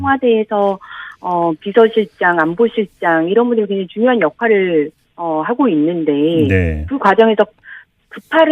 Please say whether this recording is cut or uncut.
cut